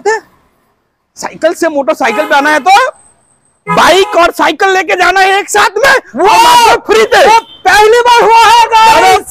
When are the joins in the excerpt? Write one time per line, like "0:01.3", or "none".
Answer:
none